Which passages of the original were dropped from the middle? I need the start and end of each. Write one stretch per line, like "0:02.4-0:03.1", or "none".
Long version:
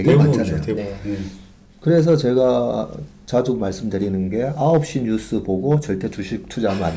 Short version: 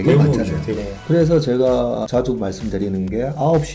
0:00.9-0:01.7
0:02.8-0:03.3